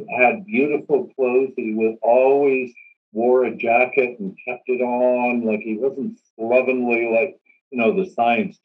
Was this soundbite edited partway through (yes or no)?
no